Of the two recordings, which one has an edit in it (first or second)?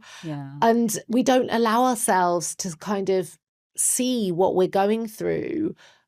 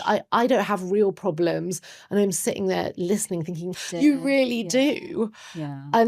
second